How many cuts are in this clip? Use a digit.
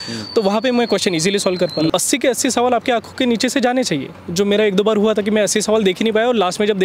1